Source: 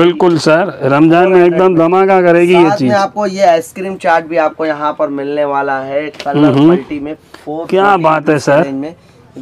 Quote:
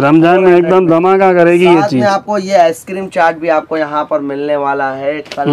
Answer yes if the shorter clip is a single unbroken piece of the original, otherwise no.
yes